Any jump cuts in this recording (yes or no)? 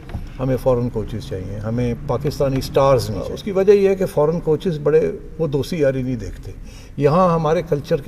yes